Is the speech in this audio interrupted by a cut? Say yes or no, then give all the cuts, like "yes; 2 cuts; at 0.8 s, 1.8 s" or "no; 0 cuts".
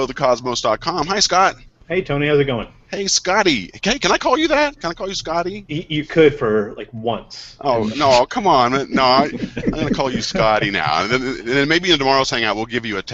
no; 0 cuts